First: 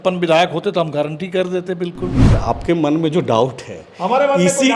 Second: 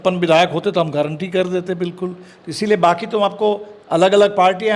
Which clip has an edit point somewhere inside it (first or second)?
first